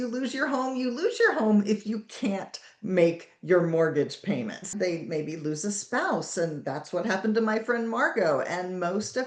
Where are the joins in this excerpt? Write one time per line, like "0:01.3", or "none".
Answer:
0:04.7